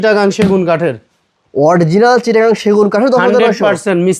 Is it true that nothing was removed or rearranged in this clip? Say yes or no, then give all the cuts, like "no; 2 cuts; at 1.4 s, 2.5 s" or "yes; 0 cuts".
yes; 0 cuts